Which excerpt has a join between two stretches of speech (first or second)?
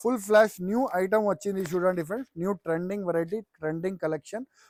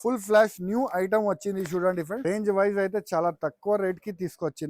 second